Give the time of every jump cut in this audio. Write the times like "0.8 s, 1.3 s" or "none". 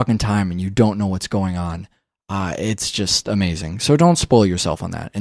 none